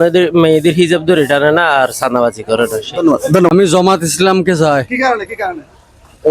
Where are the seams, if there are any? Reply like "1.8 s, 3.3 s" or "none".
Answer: 3.5 s